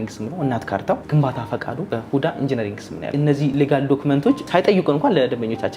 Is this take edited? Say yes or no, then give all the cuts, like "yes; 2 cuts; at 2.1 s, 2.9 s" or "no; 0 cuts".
yes; 3 cuts; at 1.8 s, 3.4 s, 4.4 s